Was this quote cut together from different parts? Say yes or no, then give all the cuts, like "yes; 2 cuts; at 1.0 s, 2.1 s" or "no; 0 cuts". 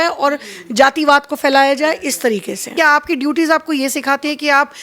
yes; 1 cut; at 2.7 s